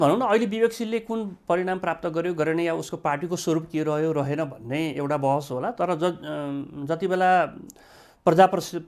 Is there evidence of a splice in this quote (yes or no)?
no